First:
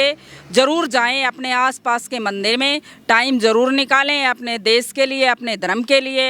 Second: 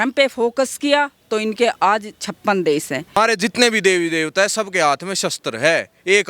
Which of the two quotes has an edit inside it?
second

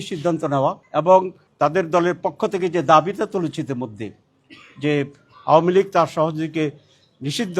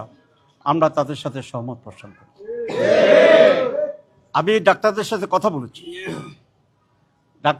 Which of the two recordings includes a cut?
first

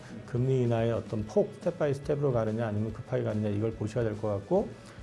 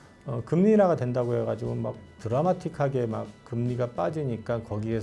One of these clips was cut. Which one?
first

